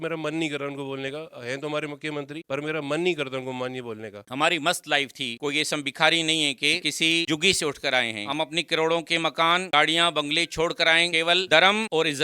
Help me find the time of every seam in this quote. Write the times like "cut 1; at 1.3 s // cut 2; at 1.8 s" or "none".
cut 1; at 4.2 s // cut 2; at 6.9 s // cut 3; at 11.1 s